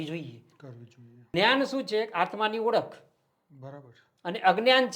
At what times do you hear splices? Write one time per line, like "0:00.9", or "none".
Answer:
0:01.3